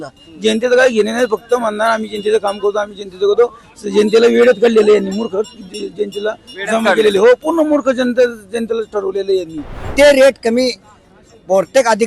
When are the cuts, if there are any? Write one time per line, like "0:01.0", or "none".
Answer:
0:09.9